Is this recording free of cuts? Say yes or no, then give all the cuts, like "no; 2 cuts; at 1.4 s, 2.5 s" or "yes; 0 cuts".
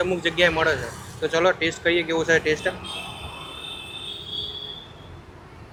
yes; 0 cuts